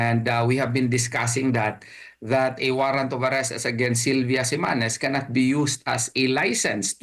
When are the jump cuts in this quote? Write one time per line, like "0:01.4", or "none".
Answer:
none